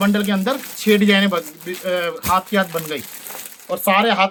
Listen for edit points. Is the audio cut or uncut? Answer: uncut